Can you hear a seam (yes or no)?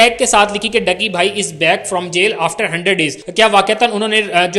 yes